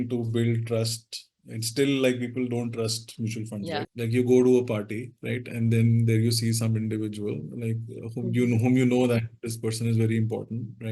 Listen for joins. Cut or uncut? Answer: cut